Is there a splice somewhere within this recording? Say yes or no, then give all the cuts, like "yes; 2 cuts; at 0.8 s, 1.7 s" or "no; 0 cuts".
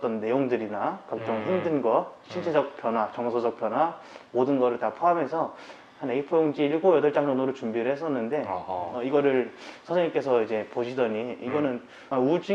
no; 0 cuts